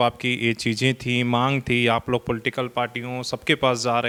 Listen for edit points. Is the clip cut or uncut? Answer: uncut